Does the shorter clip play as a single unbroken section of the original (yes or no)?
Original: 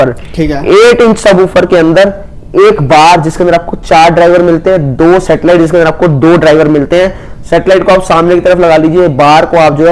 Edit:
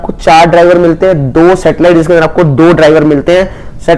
yes